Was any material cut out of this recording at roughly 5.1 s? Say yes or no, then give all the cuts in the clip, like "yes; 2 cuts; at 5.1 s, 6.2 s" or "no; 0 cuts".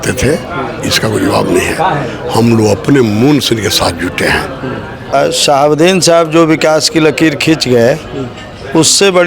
yes; 1 cut; at 5.1 s